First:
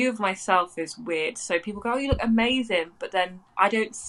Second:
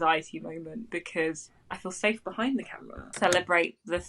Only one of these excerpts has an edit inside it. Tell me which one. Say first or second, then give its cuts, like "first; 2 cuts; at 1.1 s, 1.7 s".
second; 1 cut; at 3.1 s